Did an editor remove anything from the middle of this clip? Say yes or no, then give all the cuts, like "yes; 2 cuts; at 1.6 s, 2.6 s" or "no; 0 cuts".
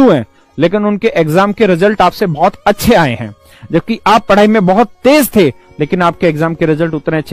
no; 0 cuts